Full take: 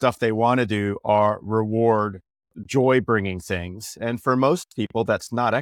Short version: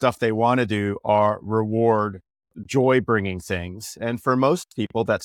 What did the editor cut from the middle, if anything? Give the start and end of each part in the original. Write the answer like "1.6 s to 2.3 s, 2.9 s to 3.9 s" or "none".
none